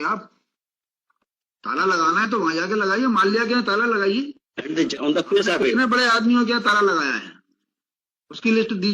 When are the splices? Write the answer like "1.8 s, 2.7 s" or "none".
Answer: 4.9 s